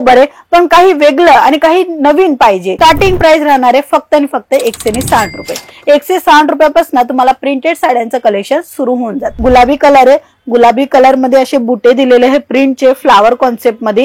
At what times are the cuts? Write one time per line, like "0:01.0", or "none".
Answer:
0:02.7
0:09.3